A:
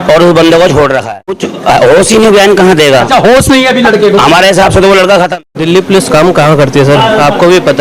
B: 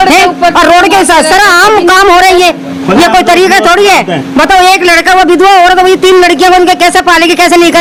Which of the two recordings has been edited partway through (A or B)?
A